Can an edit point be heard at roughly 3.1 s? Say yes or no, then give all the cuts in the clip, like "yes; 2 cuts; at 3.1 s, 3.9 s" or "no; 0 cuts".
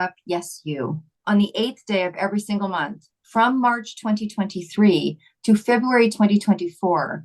no; 1 cut; at 1.1 s